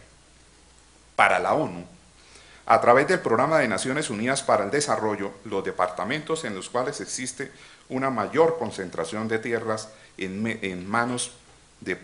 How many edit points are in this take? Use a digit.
1